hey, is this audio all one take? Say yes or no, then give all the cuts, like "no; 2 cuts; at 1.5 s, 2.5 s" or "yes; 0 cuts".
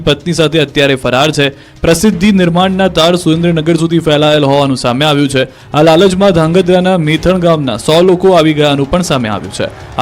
no; 1 cut; at 4.9 s